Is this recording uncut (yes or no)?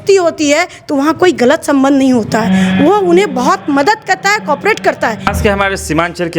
no